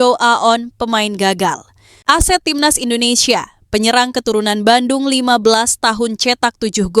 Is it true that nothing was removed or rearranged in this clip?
no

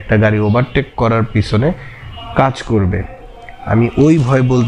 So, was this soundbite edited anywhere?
no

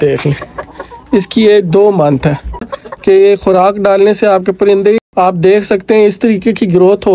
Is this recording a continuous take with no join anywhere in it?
no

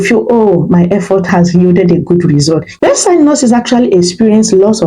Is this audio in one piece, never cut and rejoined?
no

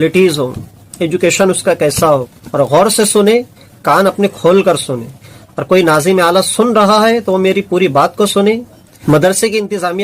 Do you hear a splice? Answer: yes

